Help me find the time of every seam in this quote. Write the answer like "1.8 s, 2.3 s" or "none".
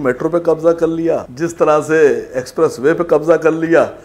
1.3 s